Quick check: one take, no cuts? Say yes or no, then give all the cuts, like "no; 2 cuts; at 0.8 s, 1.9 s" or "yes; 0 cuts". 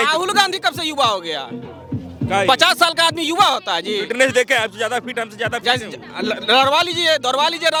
yes; 0 cuts